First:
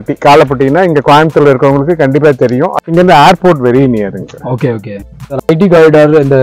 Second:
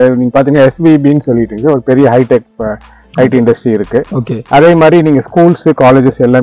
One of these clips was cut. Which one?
first; 2 cuts; at 2.8 s, 5.5 s

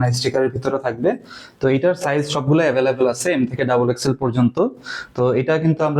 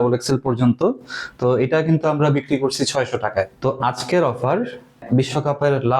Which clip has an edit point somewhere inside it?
second; 2 cuts; at 3.5 s, 5.0 s

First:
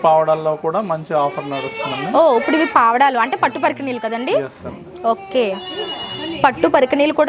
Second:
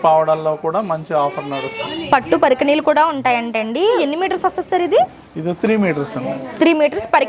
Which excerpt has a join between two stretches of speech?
second; 2 cuts; at 1.8 s, 4.0 s

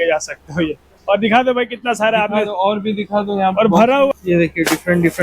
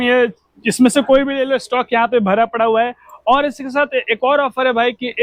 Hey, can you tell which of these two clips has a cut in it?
first; 1 cut; at 4.2 s

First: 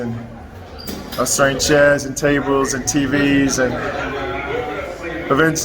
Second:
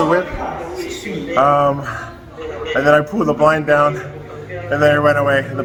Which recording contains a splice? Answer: first; 1 cut; at 4.4 s

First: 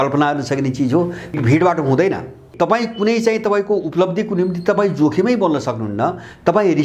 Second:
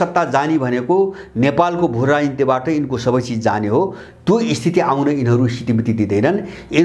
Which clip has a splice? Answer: first; 2 cuts; at 1.4 s, 2.5 s

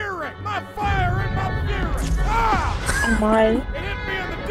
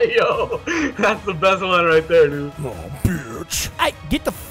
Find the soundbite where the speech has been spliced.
second; 1 cut; at 3.6 s

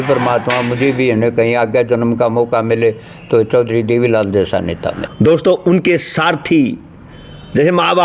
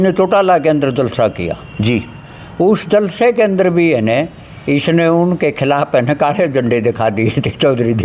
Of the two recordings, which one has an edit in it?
first; 1 cut; at 5.0 s

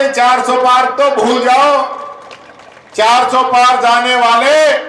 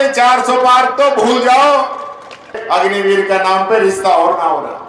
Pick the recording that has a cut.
second; 1 cut; at 2.6 s

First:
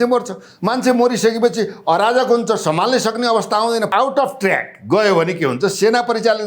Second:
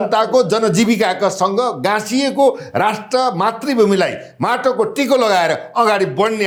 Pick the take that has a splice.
first; 1 cut; at 3.9 s

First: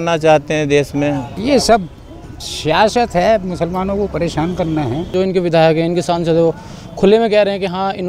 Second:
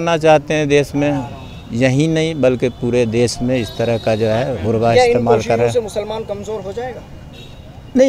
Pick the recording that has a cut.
first; 2 cuts; at 1.3 s, 5.1 s

